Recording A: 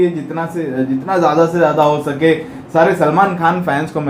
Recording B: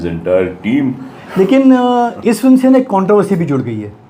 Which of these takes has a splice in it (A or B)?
B